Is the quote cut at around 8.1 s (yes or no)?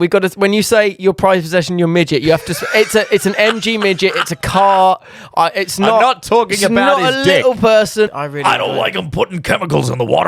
yes